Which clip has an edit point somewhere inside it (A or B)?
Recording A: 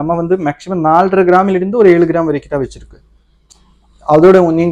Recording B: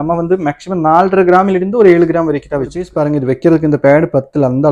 B